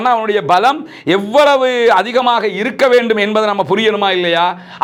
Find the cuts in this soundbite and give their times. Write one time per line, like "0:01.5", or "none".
none

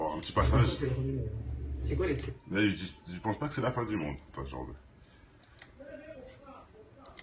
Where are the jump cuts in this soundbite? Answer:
0:06.3

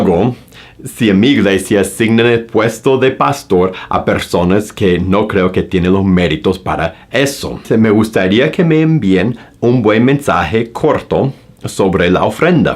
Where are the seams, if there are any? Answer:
0:07.6

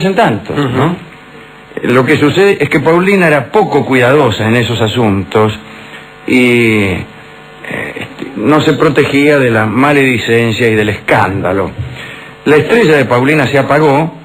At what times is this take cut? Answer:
0:11.9

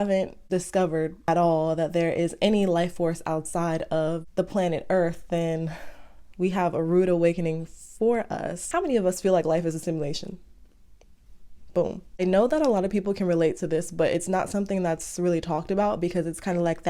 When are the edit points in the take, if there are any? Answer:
0:01.3
0:08.6

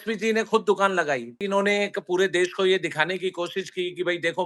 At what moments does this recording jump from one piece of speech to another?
0:01.5

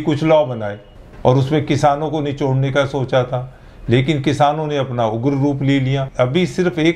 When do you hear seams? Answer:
0:06.0

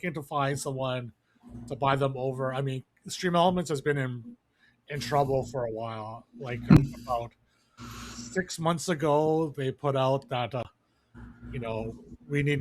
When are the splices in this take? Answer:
0:06.8
0:10.6

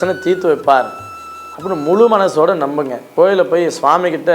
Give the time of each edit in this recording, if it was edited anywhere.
0:03.1

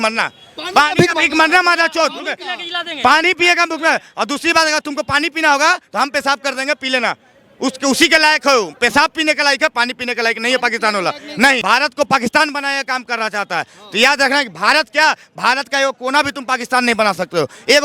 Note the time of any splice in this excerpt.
0:11.6

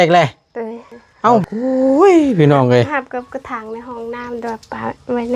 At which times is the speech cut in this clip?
0:01.4

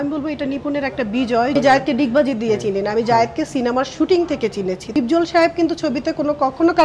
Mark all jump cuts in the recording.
0:01.5
0:04.9

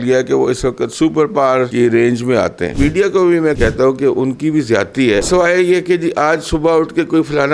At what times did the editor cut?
0:01.7
0:02.6
0:03.6
0:05.3

